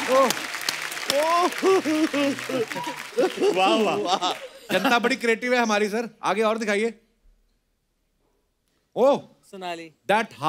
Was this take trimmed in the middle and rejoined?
no; 0 cuts

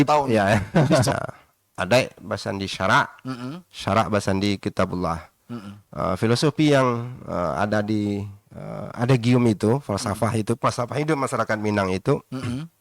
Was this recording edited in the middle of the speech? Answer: yes; 1 cut; at 1.1 s

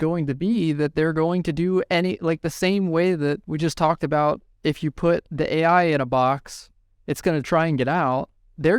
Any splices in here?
no; 0 cuts

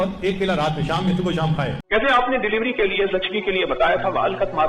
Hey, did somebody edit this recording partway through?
yes; 1 cut; at 1.8 s

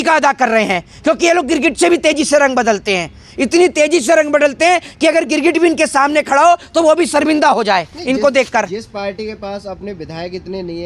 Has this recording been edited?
no; 0 cuts

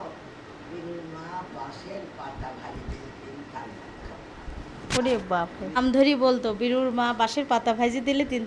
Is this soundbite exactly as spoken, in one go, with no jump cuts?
no; 1 cut; at 5.8 s

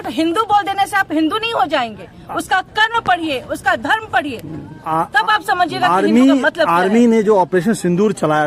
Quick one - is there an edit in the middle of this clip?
no; 0 cuts

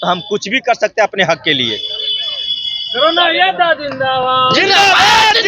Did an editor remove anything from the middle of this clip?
no; 0 cuts

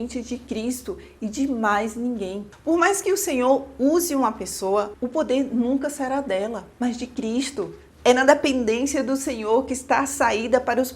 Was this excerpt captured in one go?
no; 2 cuts; at 2.4 s, 7.8 s

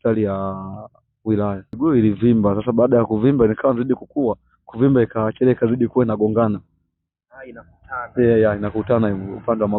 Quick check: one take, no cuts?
no; 1 cut; at 1.7 s

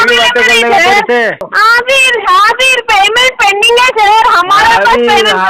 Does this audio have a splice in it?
yes; 1 cut; at 1.5 s

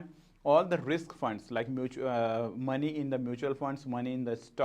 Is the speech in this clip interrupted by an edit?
no; 0 cuts

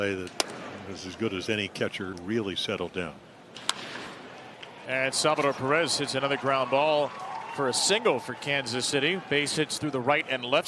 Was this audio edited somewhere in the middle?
yes; 1 cut; at 2.2 s

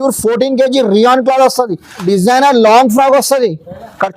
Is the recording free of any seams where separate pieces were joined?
no; 1 cut; at 2.0 s

